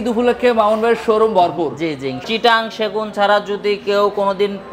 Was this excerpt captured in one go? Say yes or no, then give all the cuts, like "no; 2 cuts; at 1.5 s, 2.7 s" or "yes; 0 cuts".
no; 1 cut; at 2.2 s